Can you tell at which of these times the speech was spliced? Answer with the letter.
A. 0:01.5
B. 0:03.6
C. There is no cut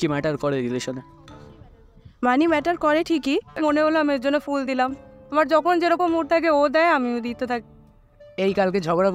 B